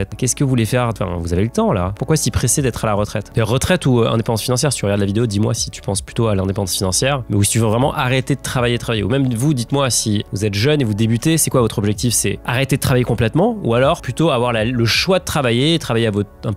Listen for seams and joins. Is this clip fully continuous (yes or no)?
yes